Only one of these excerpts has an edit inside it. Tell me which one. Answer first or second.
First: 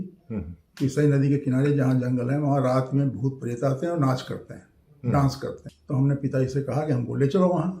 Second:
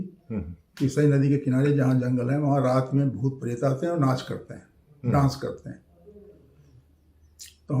first